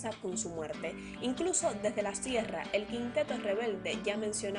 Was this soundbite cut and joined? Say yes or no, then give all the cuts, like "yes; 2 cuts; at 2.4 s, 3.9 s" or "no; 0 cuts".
no; 0 cuts